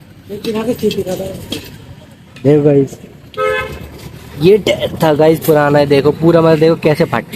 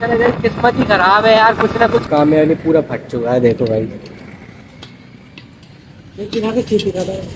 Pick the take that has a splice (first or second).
second